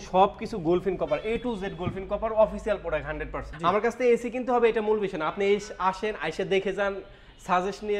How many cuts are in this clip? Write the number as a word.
one